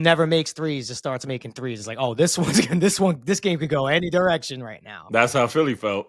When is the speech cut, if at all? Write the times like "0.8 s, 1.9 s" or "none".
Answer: none